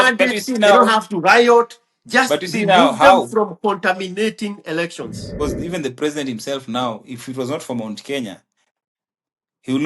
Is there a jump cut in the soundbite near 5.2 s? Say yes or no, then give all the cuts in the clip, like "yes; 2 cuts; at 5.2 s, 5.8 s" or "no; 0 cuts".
yes; 1 cut; at 5.2 s